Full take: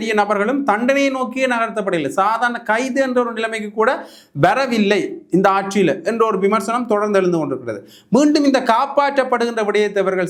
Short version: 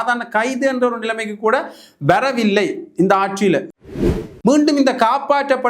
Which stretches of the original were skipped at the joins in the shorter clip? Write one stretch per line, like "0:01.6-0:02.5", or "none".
0:06.1-0:07.4